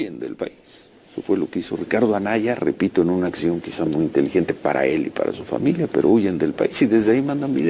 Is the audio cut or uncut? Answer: uncut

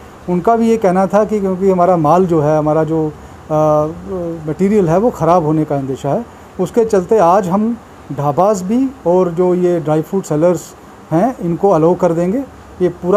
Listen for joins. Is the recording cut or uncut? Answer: uncut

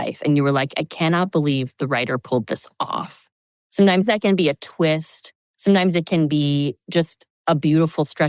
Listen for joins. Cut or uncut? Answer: cut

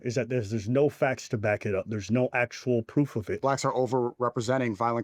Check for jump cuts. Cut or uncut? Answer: cut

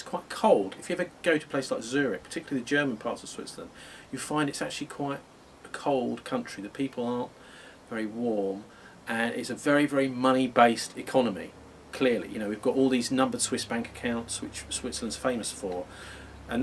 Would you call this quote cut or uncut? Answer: cut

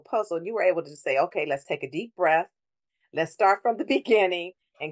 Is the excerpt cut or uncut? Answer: uncut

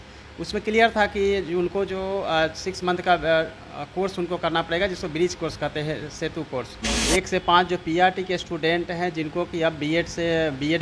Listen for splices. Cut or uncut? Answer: cut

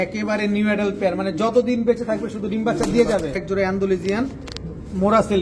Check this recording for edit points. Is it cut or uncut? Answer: cut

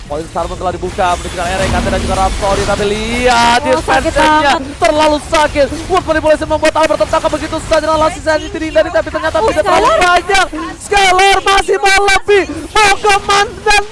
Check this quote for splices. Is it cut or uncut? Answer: uncut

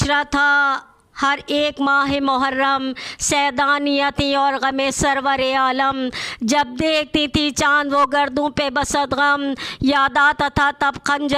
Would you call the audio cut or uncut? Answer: uncut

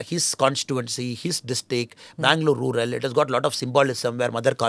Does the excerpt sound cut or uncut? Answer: uncut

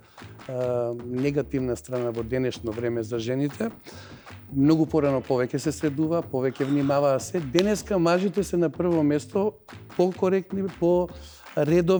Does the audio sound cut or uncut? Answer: uncut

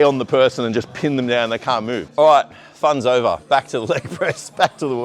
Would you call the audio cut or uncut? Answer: cut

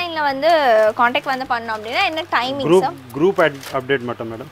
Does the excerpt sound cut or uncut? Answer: uncut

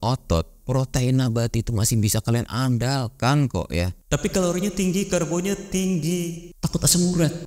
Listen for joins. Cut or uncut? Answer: cut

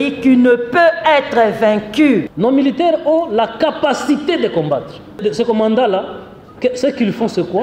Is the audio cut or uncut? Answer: cut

